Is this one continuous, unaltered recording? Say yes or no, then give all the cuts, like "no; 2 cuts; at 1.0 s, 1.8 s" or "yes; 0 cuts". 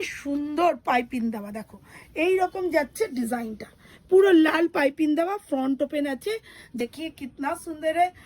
no; 1 cut; at 6.8 s